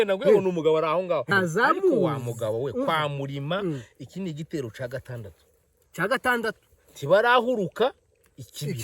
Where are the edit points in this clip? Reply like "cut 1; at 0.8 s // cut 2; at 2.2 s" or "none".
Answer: cut 1; at 1.3 s